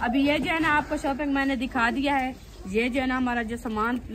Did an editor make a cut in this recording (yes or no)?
no